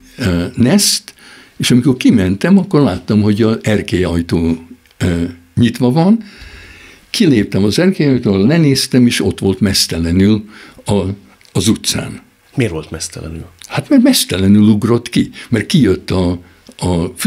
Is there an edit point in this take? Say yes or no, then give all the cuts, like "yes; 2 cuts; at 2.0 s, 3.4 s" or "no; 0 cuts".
no; 0 cuts